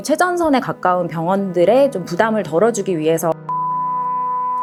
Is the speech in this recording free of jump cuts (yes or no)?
yes